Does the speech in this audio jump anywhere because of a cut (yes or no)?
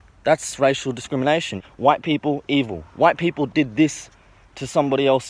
yes